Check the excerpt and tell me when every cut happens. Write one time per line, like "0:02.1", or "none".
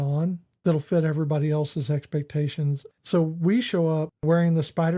0:02.9
0:04.2